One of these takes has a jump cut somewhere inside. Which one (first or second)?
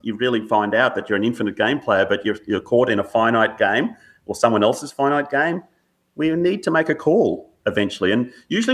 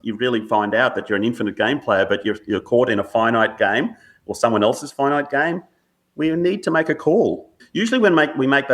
second